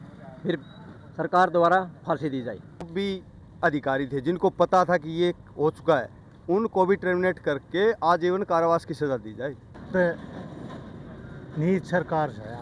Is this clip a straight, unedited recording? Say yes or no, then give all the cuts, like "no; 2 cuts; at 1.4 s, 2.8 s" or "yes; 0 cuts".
no; 2 cuts; at 2.9 s, 9.8 s